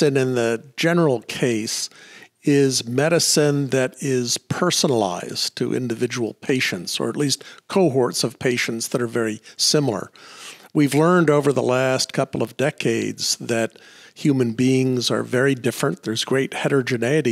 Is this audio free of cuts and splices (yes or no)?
yes